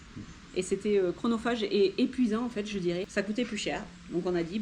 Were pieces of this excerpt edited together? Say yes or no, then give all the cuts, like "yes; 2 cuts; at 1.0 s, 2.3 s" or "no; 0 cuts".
yes; 1 cut; at 3.1 s